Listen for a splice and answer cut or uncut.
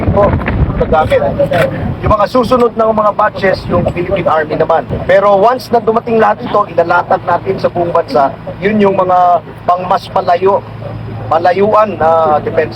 cut